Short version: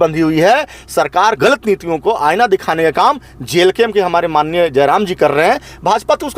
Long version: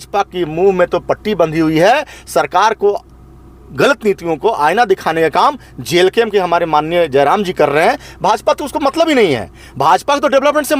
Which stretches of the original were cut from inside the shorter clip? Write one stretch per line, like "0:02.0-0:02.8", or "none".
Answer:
0:02.8-0:03.7